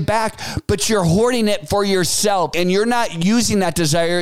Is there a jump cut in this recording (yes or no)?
yes